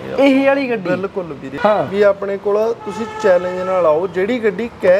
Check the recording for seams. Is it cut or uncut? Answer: cut